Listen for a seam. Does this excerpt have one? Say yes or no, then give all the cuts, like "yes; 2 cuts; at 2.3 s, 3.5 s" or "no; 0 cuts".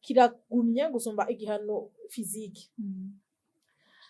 no; 0 cuts